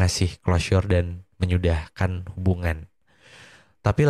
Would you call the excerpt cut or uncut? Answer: uncut